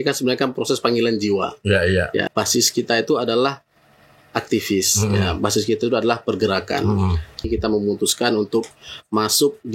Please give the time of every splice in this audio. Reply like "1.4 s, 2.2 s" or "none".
2.3 s, 7.5 s